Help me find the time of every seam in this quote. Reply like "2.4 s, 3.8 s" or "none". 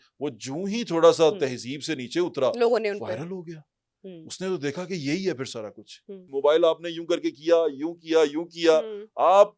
6.2 s